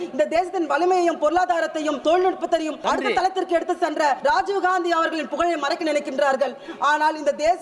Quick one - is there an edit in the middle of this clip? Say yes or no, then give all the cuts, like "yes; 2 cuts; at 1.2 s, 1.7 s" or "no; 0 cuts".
yes; 3 cuts; at 2.0 s, 2.7 s, 4.2 s